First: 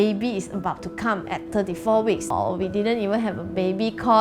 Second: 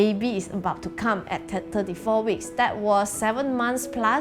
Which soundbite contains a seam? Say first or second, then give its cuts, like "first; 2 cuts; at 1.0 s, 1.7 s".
first; 2 cuts; at 1.5 s, 2.3 s